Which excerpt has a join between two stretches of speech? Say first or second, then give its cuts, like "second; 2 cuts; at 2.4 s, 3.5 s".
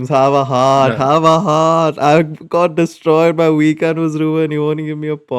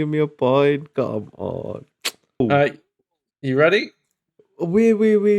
second; 1 cut; at 2.4 s